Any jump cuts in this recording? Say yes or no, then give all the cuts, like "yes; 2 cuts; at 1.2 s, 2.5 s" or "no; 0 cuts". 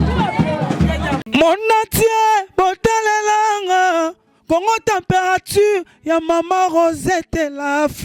yes; 1 cut; at 1.3 s